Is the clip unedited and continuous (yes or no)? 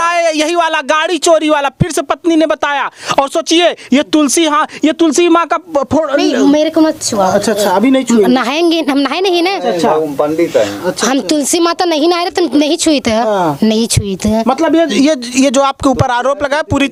yes